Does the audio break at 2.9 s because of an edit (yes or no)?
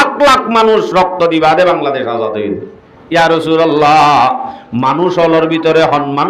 yes